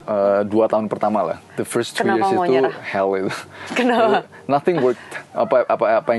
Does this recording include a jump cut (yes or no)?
no